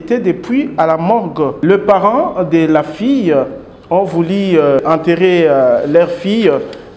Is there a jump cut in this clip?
yes; 2 cuts; at 1.6 s, 4.8 s

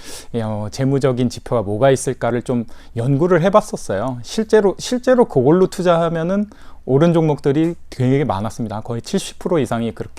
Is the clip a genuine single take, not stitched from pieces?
yes; 0 cuts

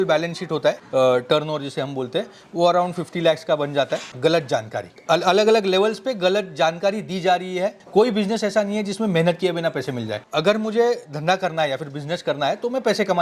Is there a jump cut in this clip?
yes; 3 cuts; at 4.1 s, 7.8 s, 10.2 s

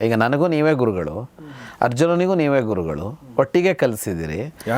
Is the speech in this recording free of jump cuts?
yes; 0 cuts

